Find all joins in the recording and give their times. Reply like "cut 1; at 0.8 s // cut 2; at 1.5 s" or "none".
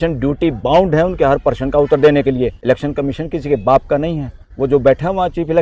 cut 1; at 2.6 s